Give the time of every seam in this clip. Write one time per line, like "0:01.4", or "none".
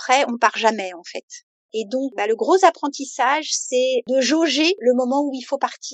0:02.1
0:04.0
0:04.8